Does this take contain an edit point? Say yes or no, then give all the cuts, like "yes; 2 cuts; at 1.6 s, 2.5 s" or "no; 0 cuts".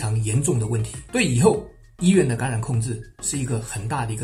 yes; 1 cut; at 0.9 s